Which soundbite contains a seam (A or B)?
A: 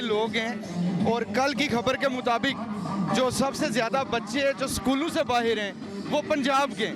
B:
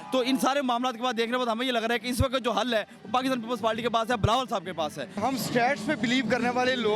B